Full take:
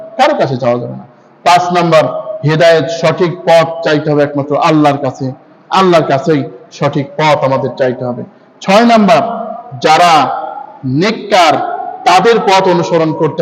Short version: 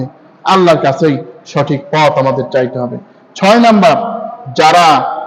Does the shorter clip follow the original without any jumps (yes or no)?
yes